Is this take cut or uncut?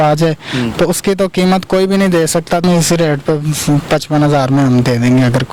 cut